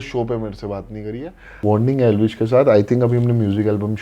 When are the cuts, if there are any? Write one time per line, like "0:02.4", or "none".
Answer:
0:01.6